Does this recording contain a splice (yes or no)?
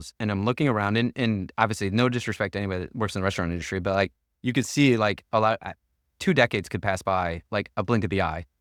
no